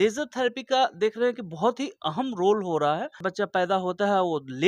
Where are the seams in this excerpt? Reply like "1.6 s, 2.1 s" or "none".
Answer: 3.2 s